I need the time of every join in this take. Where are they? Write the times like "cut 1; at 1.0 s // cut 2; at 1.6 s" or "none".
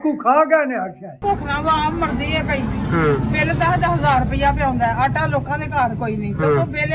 cut 1; at 1.2 s